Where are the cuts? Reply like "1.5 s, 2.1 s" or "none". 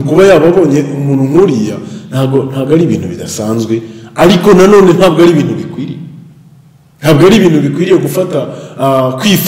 none